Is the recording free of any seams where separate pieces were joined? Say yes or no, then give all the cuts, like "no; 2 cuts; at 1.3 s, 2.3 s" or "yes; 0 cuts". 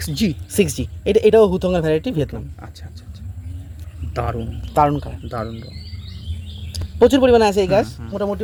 yes; 0 cuts